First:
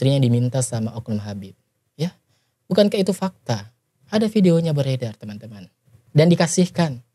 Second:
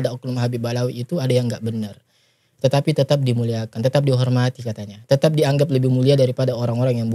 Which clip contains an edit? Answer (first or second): first